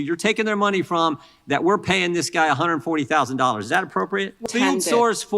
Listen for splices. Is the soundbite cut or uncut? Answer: cut